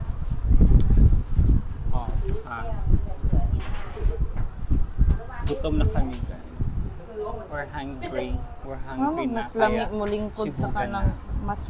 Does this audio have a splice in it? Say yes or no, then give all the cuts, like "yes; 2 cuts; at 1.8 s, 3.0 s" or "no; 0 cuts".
no; 0 cuts